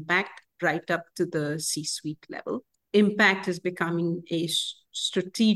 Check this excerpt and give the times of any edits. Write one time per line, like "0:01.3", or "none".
none